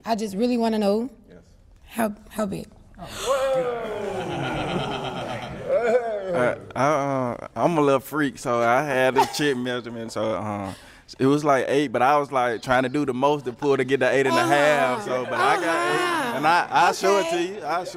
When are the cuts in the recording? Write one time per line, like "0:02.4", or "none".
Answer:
0:04.5